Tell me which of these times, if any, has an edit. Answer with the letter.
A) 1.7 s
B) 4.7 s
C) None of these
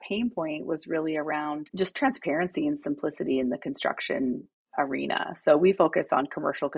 A